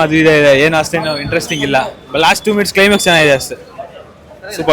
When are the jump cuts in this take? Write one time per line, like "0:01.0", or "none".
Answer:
none

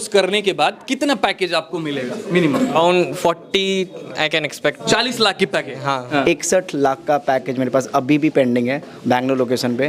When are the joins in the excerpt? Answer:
0:02.8
0:04.8
0:06.0

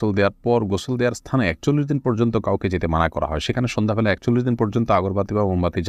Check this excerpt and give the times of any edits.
none

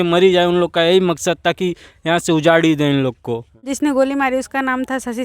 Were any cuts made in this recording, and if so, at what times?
0:03.7

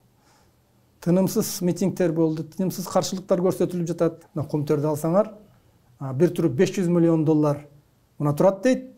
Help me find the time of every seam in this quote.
0:04.3

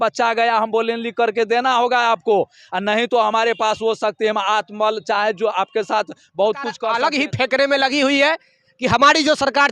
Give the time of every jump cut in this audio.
0:06.8

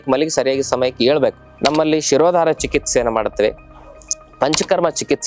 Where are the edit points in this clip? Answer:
0:01.5

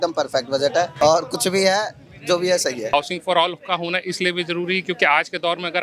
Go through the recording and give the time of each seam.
0:00.9
0:02.9

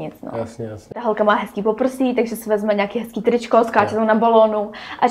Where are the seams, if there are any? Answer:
0:01.0

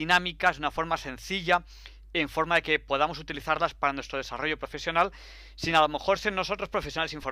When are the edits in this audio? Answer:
0:06.2

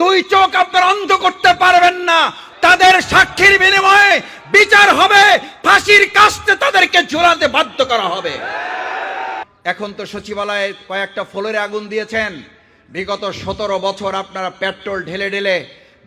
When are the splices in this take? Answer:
0:09.4

